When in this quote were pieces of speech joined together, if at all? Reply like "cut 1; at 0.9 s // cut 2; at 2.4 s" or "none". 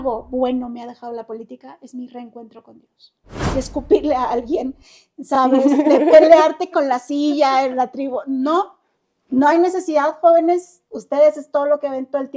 cut 1; at 3.3 s